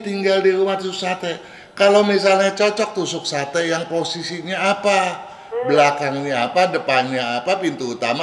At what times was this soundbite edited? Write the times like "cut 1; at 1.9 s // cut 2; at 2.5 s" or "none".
none

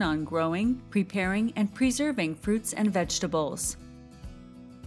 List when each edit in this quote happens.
cut 1; at 3.6 s

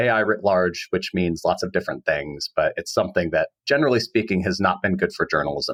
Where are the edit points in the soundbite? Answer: none

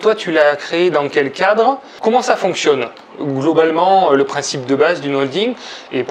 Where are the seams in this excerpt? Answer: cut 1; at 1.9 s

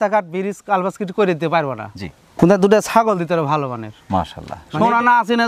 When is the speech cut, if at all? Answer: cut 1; at 4.5 s

